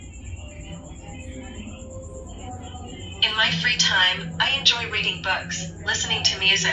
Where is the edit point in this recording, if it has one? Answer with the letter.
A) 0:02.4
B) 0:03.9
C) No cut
A